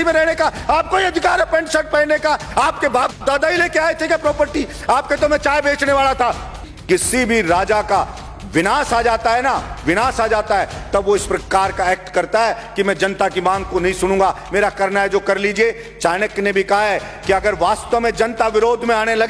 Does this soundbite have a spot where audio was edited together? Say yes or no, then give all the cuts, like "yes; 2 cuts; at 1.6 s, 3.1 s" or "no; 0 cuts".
yes; 1 cut; at 6.7 s